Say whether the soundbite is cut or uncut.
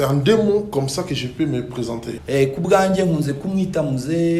cut